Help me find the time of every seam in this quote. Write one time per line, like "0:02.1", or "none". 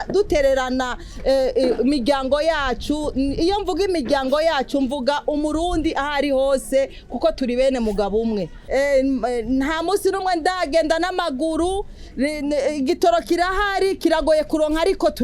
0:08.5